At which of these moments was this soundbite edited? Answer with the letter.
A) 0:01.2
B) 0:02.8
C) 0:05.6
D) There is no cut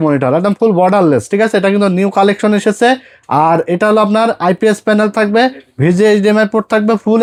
D